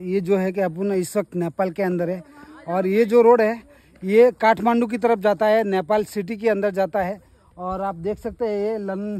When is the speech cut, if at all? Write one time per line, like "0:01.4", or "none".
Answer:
none